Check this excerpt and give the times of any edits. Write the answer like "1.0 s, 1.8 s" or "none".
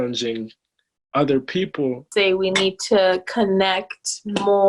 2.0 s